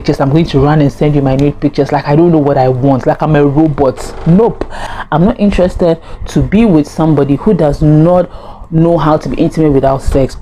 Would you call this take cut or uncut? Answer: cut